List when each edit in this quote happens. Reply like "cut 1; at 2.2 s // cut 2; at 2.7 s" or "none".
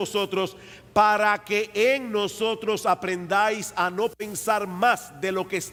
none